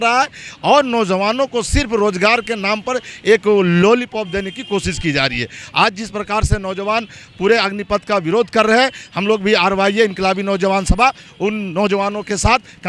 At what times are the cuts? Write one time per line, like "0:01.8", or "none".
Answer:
none